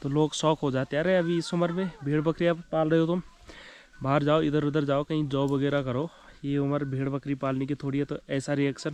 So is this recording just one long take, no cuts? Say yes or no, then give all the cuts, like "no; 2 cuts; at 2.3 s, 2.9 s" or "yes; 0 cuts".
yes; 0 cuts